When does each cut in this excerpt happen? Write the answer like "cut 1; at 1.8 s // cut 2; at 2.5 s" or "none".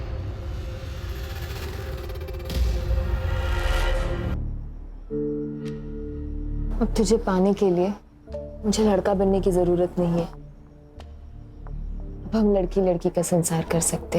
cut 1; at 4.2 s